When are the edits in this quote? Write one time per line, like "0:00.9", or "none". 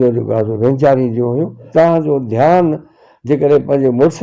0:01.6